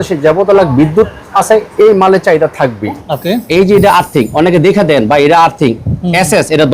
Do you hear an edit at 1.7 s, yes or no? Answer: no